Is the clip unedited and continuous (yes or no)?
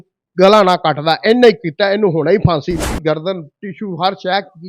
no